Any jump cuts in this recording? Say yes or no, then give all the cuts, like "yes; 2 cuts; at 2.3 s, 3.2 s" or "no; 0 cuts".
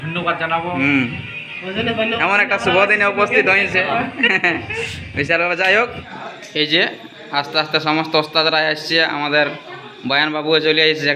yes; 1 cut; at 6.0 s